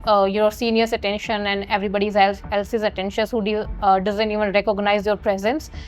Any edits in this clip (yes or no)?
no